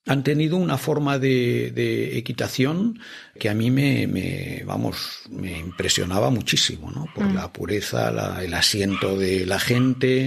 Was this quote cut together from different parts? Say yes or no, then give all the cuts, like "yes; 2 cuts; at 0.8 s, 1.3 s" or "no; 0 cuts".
no; 0 cuts